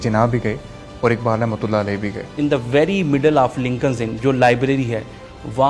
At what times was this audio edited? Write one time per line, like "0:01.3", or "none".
0:02.4